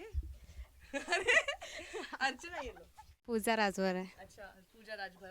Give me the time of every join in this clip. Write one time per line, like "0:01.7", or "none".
0:03.3